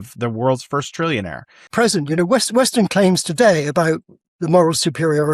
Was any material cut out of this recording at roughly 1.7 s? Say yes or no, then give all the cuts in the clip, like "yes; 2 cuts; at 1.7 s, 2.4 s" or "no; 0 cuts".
yes; 1 cut; at 1.7 s